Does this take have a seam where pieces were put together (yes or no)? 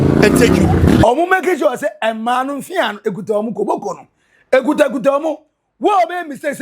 yes